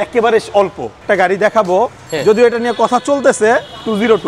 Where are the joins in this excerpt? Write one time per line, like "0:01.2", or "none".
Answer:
0:01.0